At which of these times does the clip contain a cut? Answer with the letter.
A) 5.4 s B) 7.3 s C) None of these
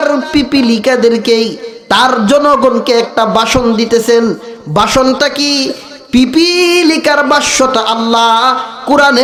C